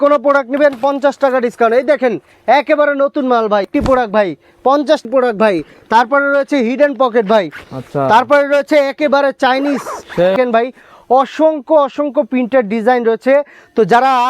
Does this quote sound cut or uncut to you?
cut